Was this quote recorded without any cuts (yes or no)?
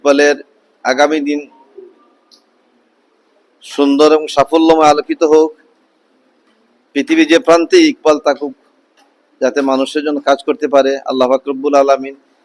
yes